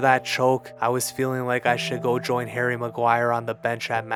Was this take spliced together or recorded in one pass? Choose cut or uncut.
uncut